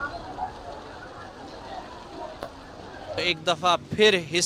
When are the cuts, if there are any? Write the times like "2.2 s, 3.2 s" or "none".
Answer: 3.3 s